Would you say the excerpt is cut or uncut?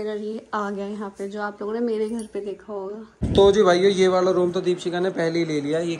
cut